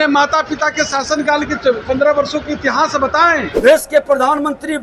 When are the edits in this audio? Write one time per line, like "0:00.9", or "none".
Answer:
0:03.5